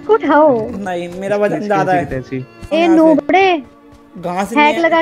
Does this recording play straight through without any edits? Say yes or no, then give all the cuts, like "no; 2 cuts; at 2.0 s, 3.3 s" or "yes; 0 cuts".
no; 1 cut; at 2.7 s